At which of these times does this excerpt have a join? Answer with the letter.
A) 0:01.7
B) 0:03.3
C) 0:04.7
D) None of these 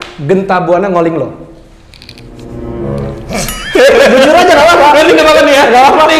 D